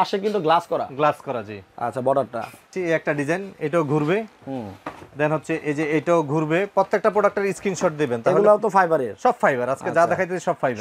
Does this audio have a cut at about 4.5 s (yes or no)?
no